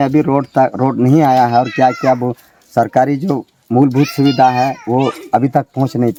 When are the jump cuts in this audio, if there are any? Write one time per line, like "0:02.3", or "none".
none

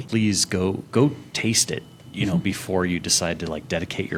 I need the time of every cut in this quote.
none

